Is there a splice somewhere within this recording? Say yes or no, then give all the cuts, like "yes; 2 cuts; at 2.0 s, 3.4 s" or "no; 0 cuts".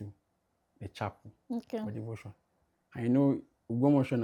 no; 0 cuts